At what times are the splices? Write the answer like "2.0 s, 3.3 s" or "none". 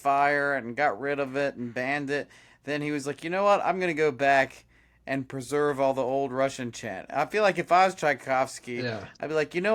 none